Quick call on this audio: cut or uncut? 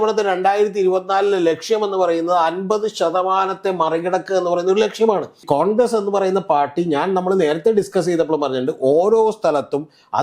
cut